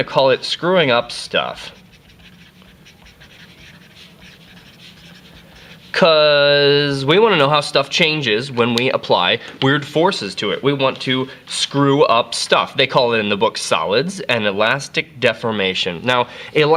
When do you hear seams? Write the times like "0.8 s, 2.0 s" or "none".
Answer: none